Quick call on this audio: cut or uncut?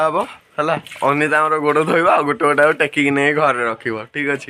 uncut